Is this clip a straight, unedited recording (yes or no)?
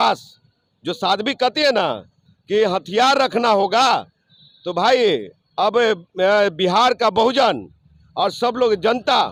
yes